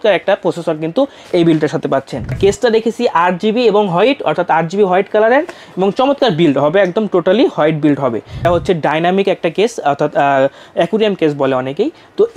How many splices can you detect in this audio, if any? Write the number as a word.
two